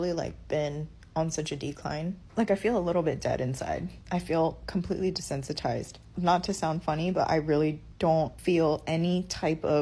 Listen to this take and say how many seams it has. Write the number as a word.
one